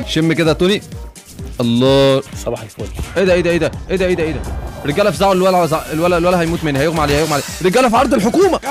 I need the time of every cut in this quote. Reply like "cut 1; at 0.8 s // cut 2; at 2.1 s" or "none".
cut 1; at 3.0 s